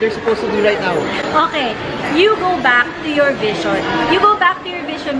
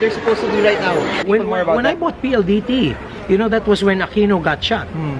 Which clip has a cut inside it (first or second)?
second